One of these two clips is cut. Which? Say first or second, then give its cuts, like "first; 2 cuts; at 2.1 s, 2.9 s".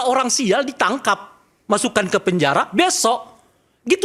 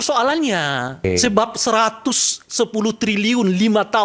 second; 1 cut; at 1.0 s